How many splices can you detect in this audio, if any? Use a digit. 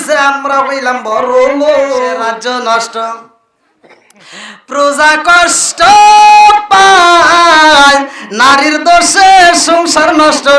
1